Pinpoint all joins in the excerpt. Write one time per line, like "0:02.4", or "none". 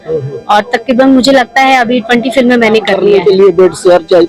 0:02.9